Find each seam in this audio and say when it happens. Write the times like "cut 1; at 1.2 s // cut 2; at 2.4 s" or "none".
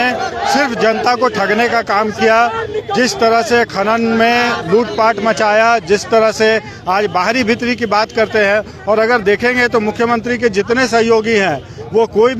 none